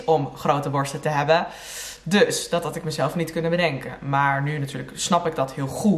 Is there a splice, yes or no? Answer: no